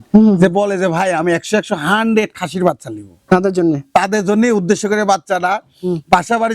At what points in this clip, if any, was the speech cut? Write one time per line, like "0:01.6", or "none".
none